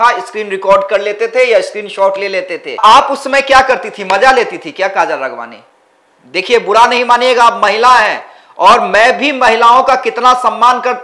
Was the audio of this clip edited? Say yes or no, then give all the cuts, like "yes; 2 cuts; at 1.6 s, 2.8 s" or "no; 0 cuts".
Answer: no; 0 cuts